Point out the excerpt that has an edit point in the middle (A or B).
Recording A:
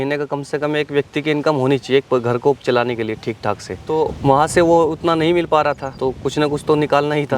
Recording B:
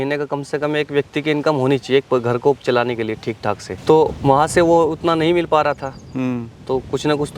A